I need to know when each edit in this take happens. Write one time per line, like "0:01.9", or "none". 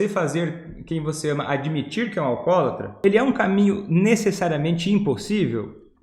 0:02.9